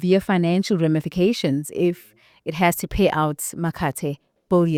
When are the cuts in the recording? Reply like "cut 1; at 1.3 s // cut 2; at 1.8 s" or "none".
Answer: none